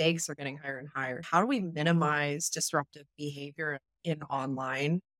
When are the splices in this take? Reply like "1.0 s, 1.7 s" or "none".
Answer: 1.2 s